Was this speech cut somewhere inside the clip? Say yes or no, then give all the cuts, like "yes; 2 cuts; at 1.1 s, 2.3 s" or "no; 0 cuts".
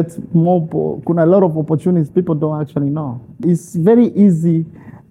yes; 1 cut; at 3.4 s